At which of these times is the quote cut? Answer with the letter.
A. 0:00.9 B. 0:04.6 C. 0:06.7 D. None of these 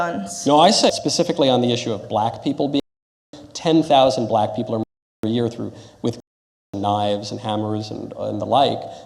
A